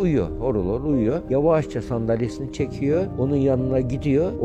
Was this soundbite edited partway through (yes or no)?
yes